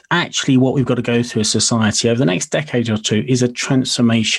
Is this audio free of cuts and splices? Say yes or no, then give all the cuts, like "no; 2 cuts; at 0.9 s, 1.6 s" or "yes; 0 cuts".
yes; 0 cuts